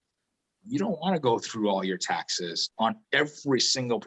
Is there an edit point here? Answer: yes; 1 cut; at 2.7 s

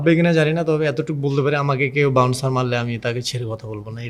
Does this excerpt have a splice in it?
no; 0 cuts

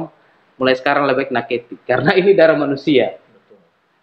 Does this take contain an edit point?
no; 0 cuts

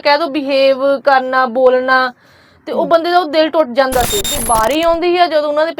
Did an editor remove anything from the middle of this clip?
yes; 1 cut; at 4.3 s

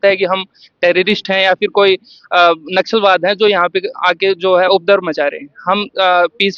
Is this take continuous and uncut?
yes; 0 cuts

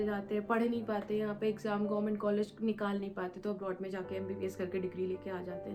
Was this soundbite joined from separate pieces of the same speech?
no; 0 cuts

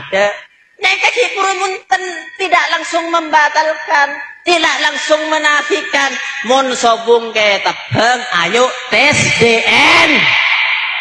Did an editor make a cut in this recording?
no; 0 cuts

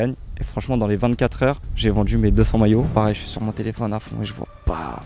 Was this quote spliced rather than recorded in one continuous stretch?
yes; 1 cut; at 2.9 s

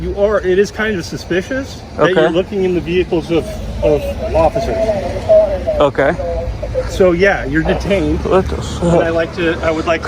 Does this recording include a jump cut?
no; 0 cuts

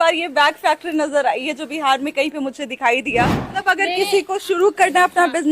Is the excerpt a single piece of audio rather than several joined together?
no; 1 cut; at 3.4 s

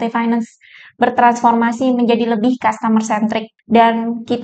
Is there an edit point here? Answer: yes; 1 cut; at 3.5 s

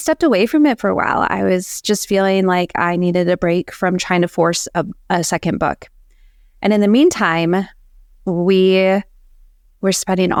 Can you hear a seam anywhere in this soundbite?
no; 0 cuts

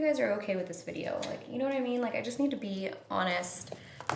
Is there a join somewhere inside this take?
no; 0 cuts

